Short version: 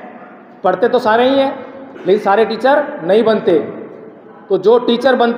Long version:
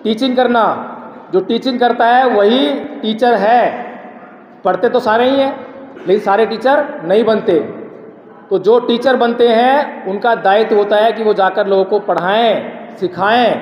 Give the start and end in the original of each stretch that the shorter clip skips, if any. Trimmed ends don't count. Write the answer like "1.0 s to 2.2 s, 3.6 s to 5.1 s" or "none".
none

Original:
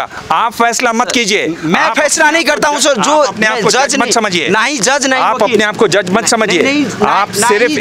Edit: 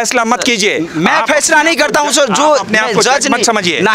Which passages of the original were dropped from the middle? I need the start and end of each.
none

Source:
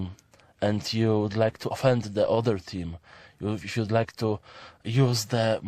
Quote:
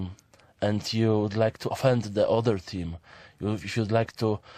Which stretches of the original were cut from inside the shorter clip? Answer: none

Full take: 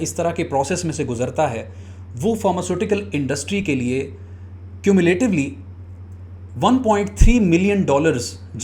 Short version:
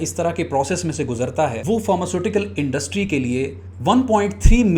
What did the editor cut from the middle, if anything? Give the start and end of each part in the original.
1.6 s to 2.1 s, 4.2 s to 6.4 s

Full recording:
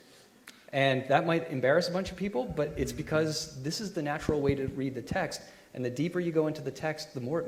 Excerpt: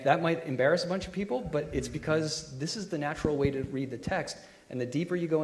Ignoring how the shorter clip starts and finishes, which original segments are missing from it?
none

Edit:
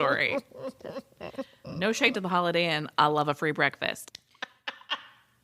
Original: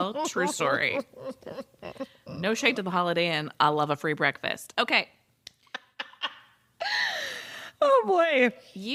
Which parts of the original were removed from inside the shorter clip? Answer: 4.6 s to 5.3 s

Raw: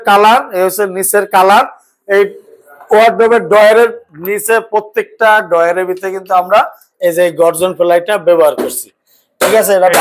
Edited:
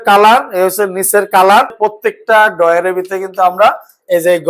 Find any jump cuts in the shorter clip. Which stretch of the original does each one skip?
1.7 s to 4.7 s

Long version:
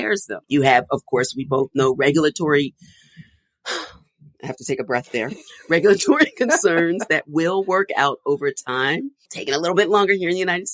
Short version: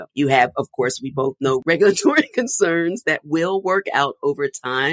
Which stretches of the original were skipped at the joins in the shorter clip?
2.0 s to 5.6 s

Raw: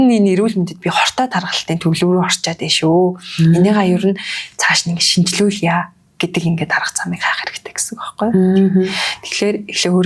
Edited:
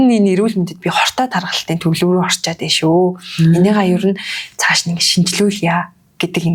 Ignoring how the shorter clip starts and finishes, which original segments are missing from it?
none

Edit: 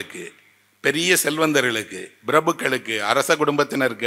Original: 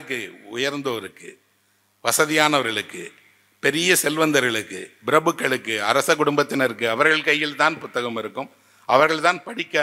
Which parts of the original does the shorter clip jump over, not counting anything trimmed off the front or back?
none

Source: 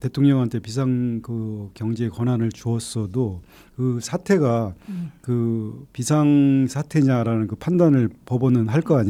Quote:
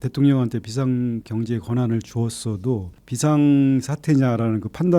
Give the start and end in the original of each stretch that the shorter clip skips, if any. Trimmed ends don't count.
1.2 s to 1.8 s, 3.5 s to 5.9 s

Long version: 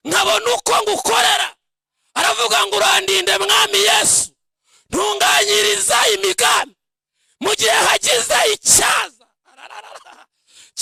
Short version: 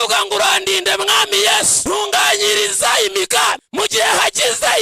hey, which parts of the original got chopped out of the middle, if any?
4.1 s to 4.8 s, 6.7 s to 7.3 s

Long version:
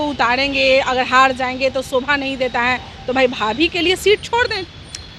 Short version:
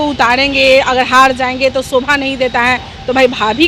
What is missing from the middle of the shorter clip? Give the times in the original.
none

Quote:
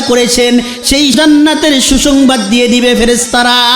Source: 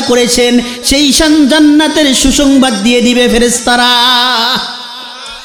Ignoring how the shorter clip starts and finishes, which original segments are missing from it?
1.2 s to 1.5 s

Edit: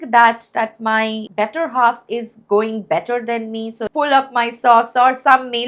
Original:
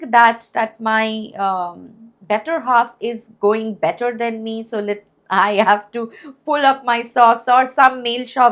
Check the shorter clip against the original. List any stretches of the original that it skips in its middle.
1.2 s to 2.2 s, 4.7 s to 6.3 s

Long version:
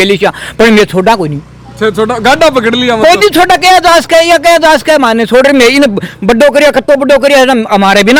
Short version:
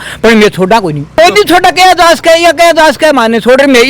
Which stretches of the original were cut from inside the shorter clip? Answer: 1.5 s to 3.0 s

